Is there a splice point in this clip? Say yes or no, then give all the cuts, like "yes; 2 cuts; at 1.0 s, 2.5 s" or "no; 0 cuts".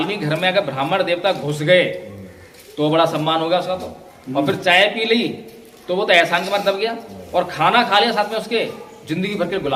no; 0 cuts